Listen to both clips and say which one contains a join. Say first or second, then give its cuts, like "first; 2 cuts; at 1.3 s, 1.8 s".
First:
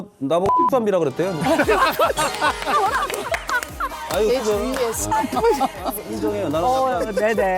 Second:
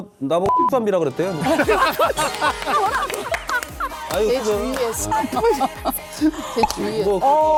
first; 1 cut; at 6.1 s